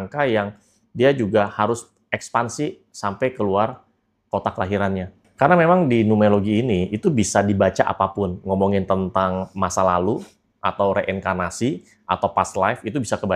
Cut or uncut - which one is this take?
cut